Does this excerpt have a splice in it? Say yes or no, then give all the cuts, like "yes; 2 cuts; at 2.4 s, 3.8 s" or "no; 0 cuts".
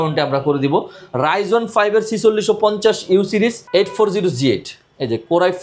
yes; 1 cut; at 3.6 s